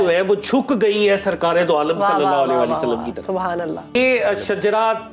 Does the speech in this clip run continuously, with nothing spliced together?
no; 1 cut; at 3.9 s

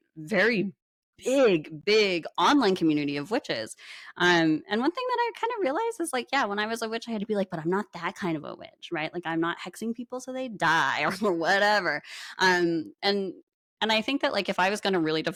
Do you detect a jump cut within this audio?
no; 0 cuts

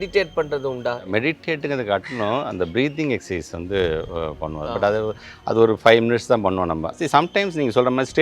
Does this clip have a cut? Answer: yes; 2 cuts; at 1.0 s, 7.0 s

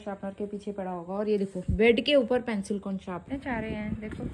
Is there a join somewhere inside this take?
yes; 1 cut; at 3.2 s

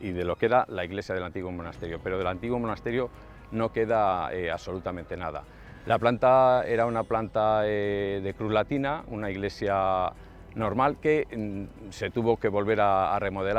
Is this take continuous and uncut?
yes; 0 cuts

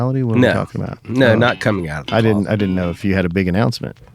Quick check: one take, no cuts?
no; 1 cut; at 3.0 s

